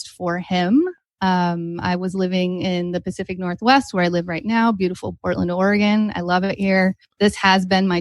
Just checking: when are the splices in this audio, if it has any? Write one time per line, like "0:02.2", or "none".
0:07.0